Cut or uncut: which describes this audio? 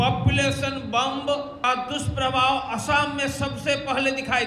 cut